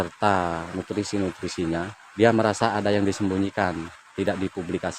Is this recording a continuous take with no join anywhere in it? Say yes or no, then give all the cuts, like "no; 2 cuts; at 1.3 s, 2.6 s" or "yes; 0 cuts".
no; 1 cut; at 2.0 s